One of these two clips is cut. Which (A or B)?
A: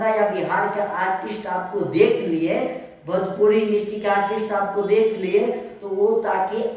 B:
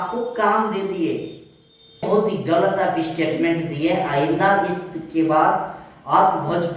B